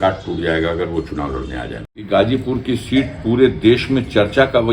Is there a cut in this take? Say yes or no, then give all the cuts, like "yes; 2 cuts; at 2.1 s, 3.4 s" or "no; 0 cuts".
yes; 1 cut; at 2.0 s